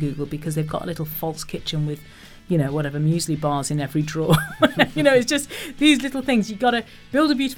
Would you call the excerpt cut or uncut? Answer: uncut